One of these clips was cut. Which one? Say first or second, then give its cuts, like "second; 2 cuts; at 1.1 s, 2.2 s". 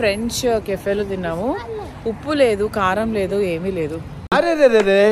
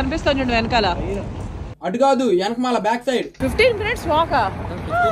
second; 1 cut; at 3.3 s